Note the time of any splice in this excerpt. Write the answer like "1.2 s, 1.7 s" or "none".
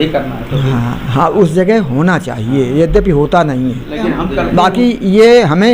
4.3 s